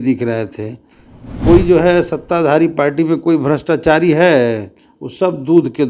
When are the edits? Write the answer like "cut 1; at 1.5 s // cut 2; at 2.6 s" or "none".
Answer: none